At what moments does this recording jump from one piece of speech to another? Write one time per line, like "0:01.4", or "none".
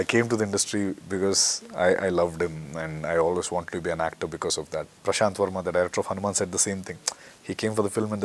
0:04.9